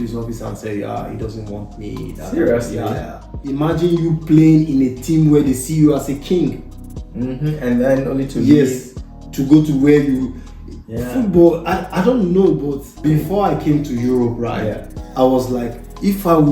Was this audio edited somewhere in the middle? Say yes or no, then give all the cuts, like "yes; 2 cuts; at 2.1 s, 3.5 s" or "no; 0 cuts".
yes; 2 cuts; at 3.4 s, 12.9 s